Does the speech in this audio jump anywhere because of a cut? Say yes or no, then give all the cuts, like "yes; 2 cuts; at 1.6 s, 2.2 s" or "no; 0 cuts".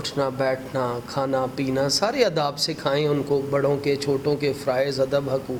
no; 0 cuts